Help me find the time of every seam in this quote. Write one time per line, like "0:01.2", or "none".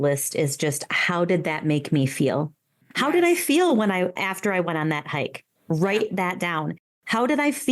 none